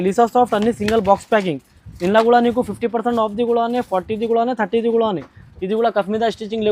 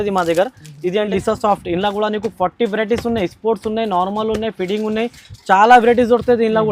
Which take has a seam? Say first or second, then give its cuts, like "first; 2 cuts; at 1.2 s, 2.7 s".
second; 1 cut; at 1.0 s